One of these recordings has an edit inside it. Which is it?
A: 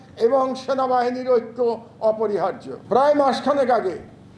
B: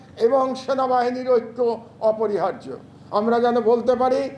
A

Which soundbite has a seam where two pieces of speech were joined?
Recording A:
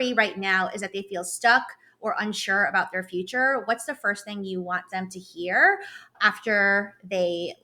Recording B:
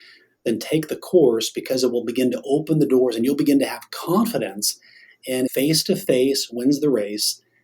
B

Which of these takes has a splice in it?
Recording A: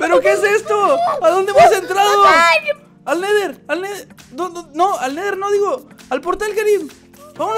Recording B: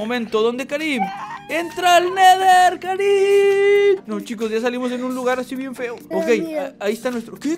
B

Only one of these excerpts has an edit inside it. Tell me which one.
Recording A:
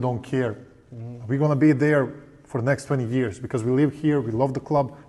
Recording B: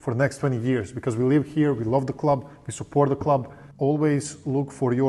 B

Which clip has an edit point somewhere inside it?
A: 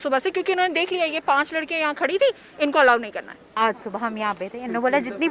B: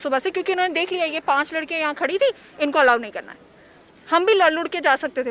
A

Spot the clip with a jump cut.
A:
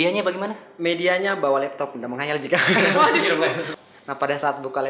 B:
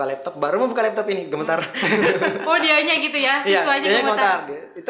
A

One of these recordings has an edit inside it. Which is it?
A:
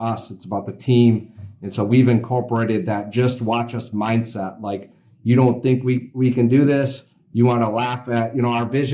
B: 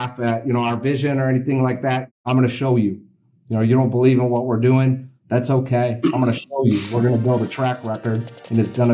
B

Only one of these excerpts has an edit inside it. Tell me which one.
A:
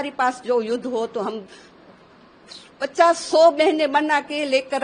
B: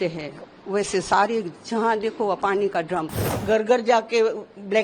B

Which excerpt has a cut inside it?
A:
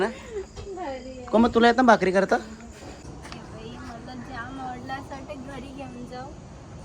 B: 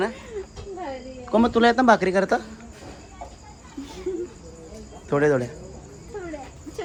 A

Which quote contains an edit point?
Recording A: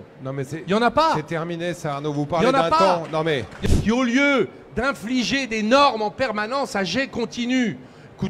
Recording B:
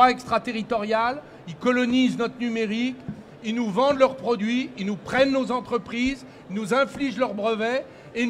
A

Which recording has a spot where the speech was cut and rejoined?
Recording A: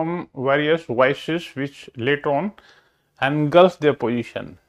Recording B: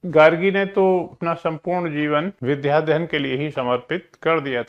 B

